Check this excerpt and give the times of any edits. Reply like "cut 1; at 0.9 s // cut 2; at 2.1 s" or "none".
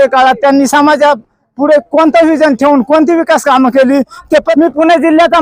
cut 1; at 4.5 s